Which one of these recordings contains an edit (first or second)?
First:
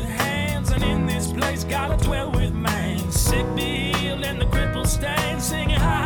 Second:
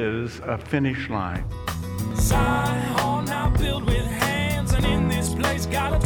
second